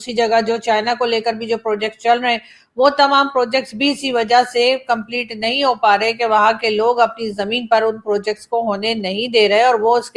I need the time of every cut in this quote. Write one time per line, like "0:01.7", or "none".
none